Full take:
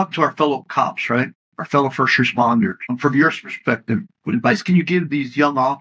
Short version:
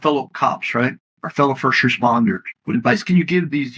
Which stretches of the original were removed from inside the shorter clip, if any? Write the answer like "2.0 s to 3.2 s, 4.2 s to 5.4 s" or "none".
2.9 s to 4.1 s